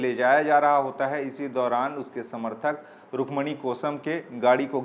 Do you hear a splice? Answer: no; 0 cuts

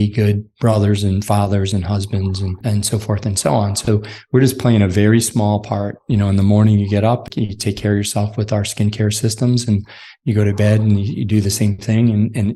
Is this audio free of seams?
no; 2 cuts; at 2.6 s, 7.3 s

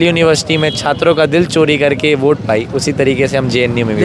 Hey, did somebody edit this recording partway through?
no; 0 cuts

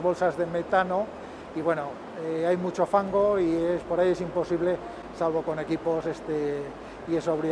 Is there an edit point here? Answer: no; 0 cuts

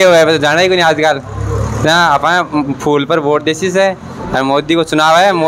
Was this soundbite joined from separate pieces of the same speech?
no; 0 cuts

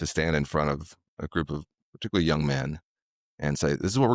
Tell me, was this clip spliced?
no; 0 cuts

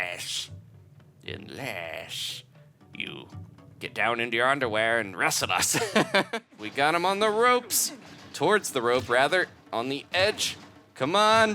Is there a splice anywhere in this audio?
yes; 1 cut; at 6.6 s

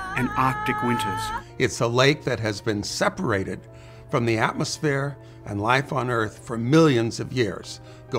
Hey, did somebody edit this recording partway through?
yes; 1 cut; at 1.3 s

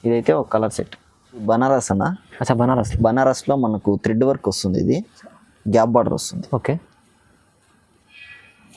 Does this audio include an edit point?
yes; 1 cut; at 1.4 s

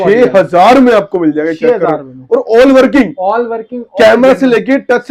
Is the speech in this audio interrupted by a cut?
no; 0 cuts

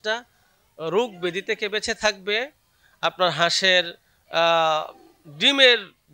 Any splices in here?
no; 0 cuts

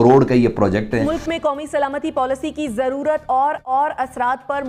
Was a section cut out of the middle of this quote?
no; 0 cuts

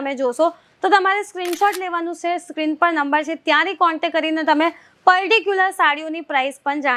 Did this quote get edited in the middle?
no; 0 cuts

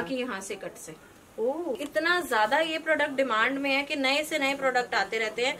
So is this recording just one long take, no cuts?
no; 1 cut; at 1.8 s

